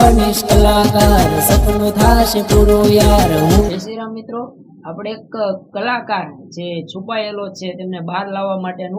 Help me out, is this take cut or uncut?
cut